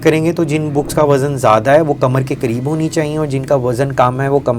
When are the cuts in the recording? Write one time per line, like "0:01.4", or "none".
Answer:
none

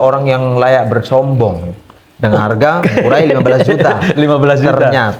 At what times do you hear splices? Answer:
none

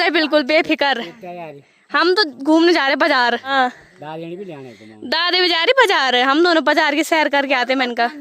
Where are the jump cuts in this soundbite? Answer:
0:03.5

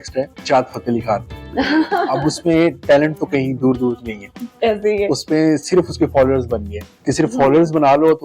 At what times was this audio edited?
0:06.8

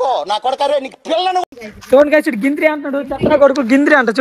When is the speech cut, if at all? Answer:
0:01.4

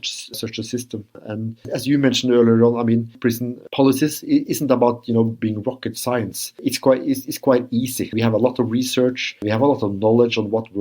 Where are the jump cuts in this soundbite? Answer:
0:01.2
0:03.2

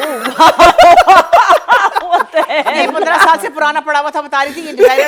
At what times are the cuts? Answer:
none

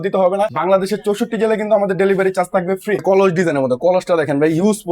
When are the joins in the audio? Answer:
0:03.0

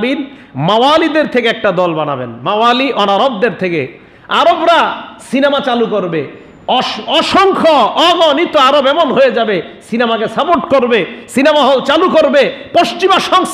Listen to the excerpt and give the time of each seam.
none

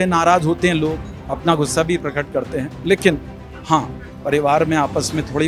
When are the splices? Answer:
none

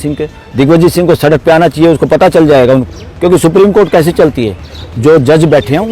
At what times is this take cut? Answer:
0:02.8

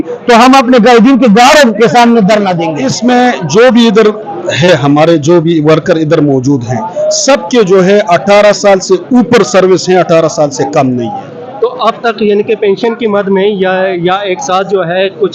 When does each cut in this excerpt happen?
0:02.7

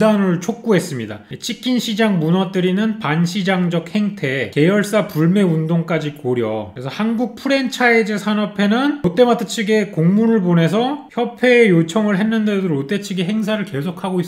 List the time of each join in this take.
none

